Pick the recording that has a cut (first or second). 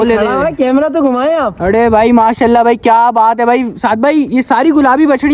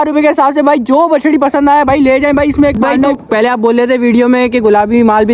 second